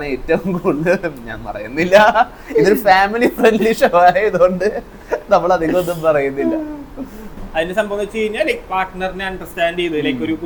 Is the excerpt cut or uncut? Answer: uncut